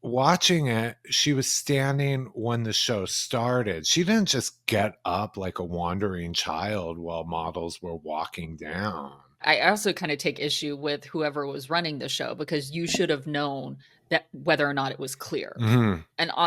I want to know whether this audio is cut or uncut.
cut